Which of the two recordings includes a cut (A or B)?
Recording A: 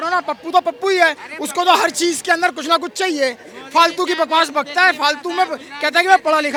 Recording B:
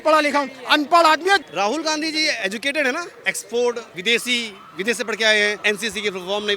B